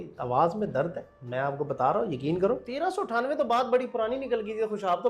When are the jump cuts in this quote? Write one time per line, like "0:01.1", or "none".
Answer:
0:02.7